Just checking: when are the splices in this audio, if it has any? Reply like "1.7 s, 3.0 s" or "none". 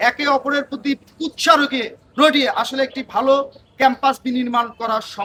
none